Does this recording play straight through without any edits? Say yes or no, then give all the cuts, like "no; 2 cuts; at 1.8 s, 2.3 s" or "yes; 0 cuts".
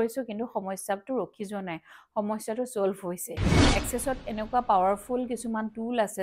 no; 1 cut; at 3.7 s